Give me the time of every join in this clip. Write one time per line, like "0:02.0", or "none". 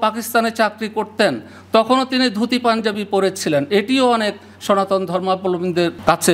none